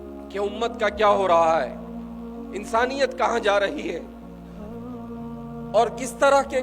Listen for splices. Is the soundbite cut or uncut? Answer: cut